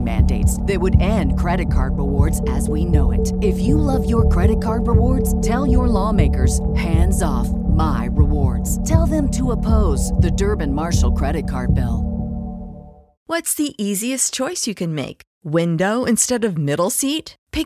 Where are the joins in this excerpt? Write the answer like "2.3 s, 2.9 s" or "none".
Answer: 13.1 s